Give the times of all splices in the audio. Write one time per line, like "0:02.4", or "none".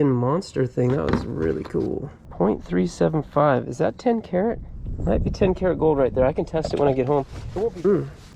0:02.2
0:07.4

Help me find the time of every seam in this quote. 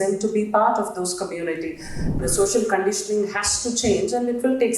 0:02.2

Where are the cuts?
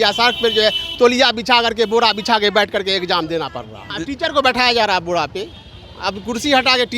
0:04.0

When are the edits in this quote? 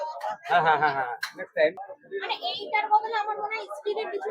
0:01.9

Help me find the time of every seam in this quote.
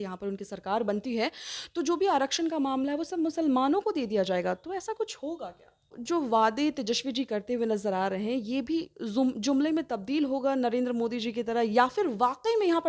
0:06.0

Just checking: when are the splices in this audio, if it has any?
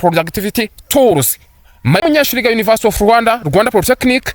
0:02.0

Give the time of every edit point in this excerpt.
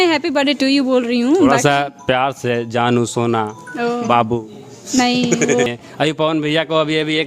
0:05.7

